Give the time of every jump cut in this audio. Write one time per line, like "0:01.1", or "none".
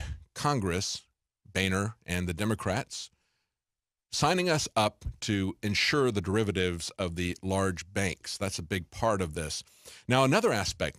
0:07.4